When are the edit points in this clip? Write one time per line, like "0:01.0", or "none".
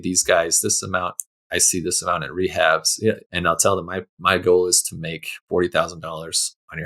0:03.2
0:05.3